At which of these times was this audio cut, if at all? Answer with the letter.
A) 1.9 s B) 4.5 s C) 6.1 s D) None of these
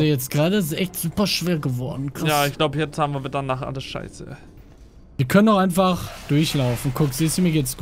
B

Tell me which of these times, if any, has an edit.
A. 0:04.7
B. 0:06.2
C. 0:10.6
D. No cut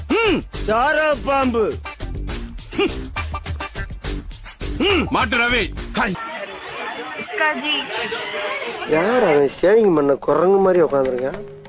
B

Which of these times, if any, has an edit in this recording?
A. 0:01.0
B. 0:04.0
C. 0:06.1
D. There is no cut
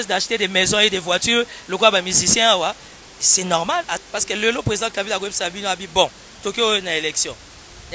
B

